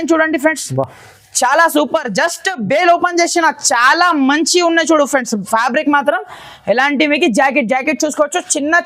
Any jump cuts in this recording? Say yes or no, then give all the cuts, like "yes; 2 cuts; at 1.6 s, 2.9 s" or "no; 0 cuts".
no; 0 cuts